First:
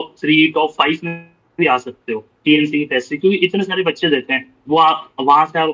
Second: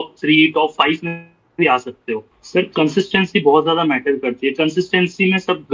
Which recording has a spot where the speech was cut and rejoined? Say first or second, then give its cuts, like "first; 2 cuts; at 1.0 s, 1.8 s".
second; 1 cut; at 2.3 s